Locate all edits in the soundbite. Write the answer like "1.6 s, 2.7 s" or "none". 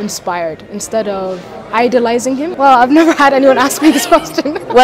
2.5 s